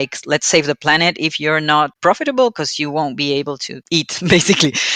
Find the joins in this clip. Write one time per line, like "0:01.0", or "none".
0:01.9
0:03.7